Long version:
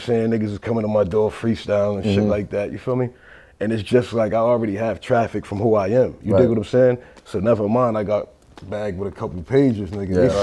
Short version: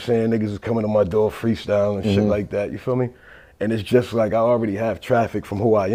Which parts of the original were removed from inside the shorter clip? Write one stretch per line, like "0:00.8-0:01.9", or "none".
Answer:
none